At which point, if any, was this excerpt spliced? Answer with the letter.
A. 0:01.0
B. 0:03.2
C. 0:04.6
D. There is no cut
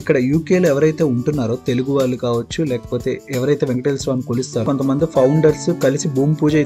C